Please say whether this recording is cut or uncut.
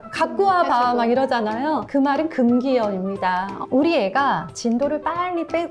cut